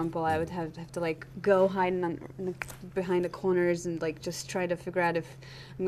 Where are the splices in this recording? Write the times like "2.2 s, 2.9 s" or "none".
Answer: none